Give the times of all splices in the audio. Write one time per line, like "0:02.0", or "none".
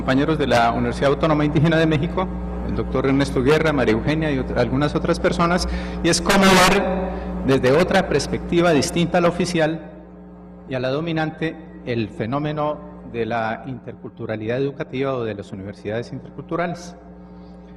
none